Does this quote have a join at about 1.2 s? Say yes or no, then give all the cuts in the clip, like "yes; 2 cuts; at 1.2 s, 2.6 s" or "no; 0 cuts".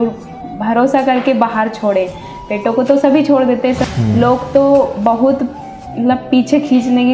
no; 1 cut; at 3.8 s